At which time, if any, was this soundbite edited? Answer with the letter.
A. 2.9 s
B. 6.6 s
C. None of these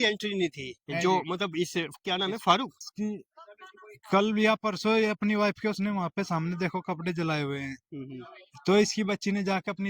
A